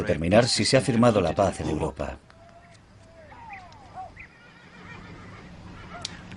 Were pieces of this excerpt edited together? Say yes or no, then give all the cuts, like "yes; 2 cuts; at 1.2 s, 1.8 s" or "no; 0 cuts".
yes; 1 cut; at 1.5 s